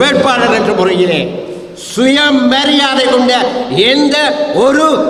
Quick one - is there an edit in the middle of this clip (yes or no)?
no